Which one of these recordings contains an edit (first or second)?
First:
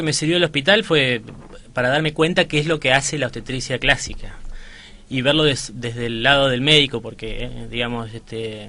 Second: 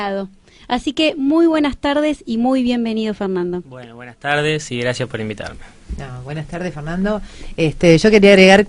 second